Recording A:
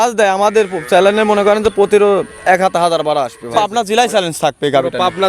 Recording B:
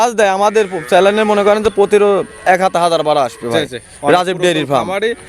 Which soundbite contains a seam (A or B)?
A